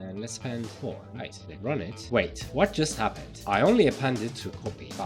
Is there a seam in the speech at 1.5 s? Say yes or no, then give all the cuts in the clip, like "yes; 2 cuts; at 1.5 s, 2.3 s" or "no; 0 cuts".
yes; 1 cut; at 1.5 s